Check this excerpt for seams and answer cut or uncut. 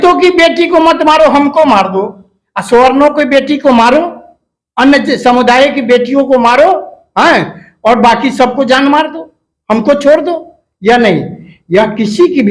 uncut